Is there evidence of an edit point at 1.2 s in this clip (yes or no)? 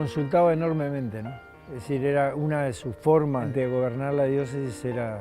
no